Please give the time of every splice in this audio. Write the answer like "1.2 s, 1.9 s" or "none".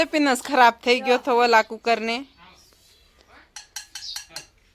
none